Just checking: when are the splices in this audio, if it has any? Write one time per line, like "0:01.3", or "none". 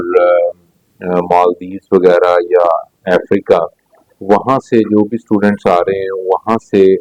none